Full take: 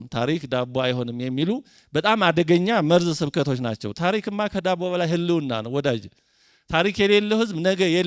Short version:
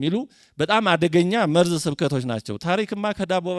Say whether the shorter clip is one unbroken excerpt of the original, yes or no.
yes